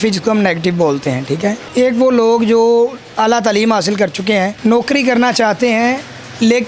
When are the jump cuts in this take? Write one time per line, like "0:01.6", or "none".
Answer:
0:01.7
0:04.5